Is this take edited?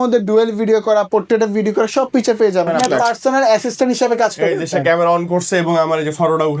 yes; 1 cut; at 2.8 s

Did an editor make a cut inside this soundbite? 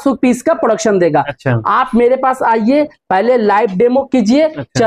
no; 0 cuts

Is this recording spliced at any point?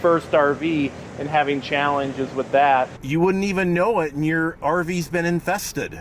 yes; 1 cut; at 3.0 s

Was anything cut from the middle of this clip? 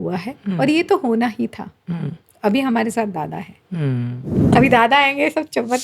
yes; 1 cut; at 4.4 s

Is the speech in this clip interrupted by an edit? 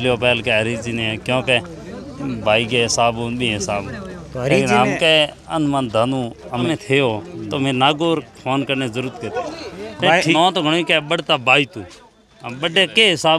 yes; 2 cuts; at 6.7 s, 10.3 s

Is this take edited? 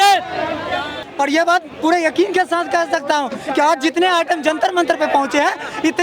yes; 1 cut; at 1.0 s

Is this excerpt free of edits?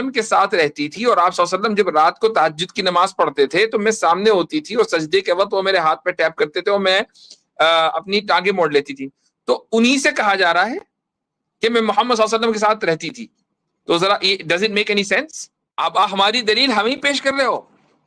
no; 1 cut; at 15.6 s

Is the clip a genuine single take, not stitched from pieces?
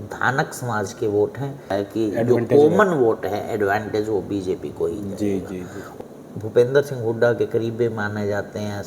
no; 2 cuts; at 1.7 s, 5.8 s

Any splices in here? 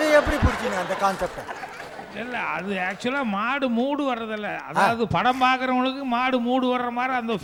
no; 0 cuts

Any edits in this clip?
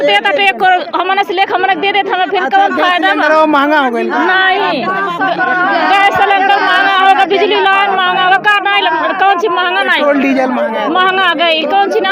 no; 0 cuts

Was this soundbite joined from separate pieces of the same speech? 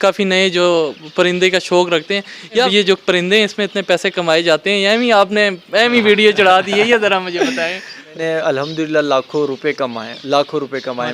yes; 2 cuts; at 2.7 s, 8.1 s

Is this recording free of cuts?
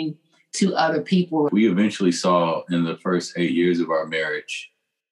no; 1 cut; at 1.5 s

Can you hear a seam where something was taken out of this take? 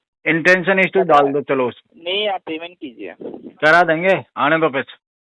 yes; 1 cut; at 1.9 s

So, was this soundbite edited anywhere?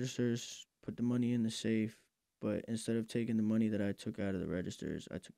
no; 0 cuts

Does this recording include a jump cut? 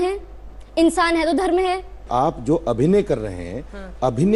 yes; 1 cut; at 2.0 s

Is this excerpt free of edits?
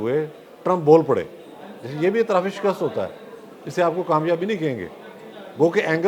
yes; 0 cuts

